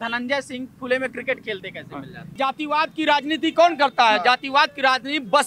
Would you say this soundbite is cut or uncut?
cut